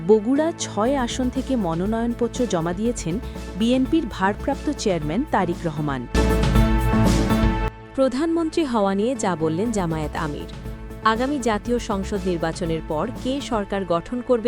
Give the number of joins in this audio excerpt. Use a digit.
1